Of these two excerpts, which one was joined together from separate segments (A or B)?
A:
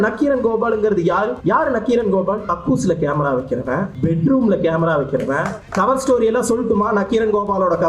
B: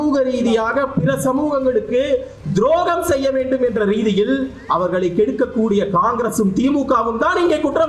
A